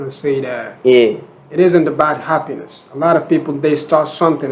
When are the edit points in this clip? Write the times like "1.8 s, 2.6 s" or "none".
none